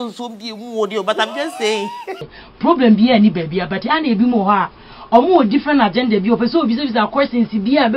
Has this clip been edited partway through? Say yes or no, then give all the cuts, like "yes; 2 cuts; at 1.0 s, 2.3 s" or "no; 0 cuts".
yes; 1 cut; at 2.1 s